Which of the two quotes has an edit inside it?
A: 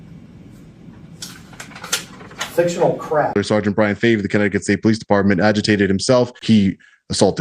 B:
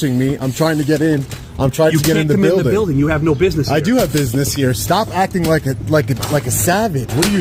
A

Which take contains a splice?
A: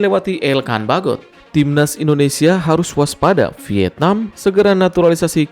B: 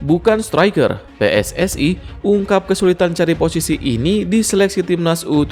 A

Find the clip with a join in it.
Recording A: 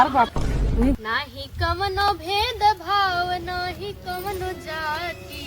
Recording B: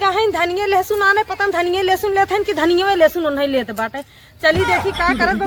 A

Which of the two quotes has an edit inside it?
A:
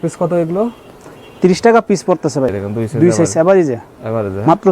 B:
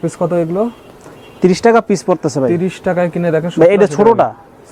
A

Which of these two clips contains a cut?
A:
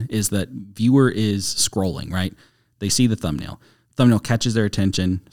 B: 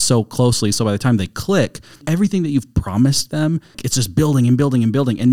B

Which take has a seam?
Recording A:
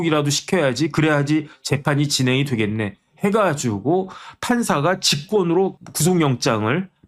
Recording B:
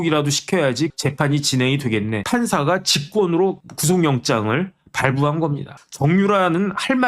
B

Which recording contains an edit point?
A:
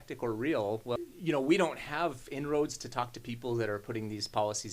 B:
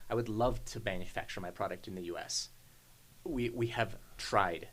A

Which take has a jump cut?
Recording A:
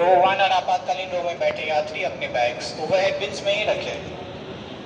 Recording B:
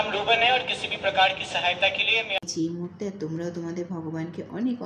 B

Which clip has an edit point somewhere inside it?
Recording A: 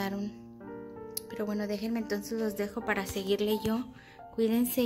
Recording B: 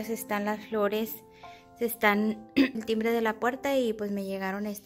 B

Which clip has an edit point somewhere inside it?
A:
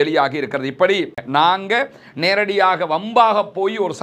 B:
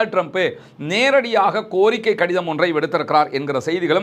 A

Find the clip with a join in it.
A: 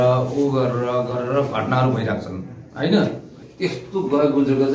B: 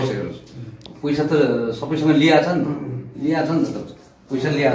A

